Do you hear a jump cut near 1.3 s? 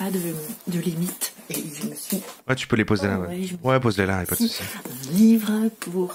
yes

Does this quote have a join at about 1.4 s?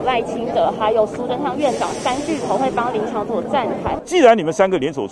no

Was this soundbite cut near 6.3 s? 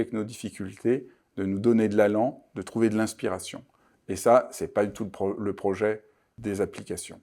yes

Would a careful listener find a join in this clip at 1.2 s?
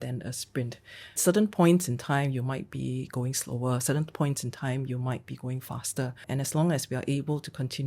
yes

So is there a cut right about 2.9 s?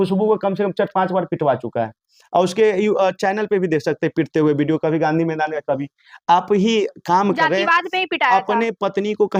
no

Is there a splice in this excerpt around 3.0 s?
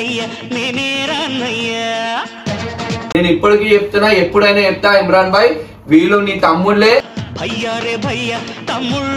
yes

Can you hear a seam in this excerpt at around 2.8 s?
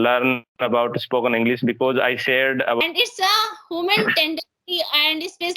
yes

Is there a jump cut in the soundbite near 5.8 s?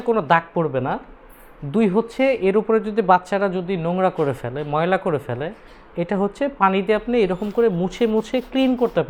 no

